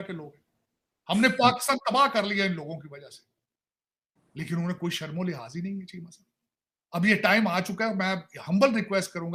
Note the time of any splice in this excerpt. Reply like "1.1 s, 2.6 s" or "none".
none